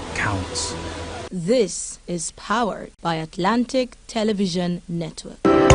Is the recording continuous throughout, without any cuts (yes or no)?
yes